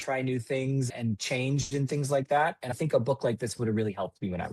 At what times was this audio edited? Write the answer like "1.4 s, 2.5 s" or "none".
0.9 s, 2.7 s